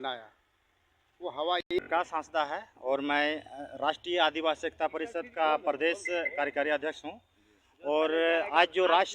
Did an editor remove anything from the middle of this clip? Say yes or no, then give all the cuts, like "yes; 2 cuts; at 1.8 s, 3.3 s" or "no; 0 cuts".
yes; 1 cut; at 1.6 s